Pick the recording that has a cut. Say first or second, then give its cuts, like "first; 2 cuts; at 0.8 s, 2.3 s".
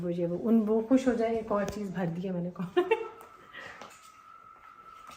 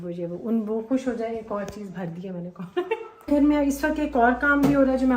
second; 1 cut; at 3.3 s